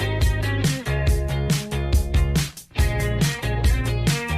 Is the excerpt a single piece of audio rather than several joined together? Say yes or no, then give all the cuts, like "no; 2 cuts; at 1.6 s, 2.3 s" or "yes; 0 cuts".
yes; 0 cuts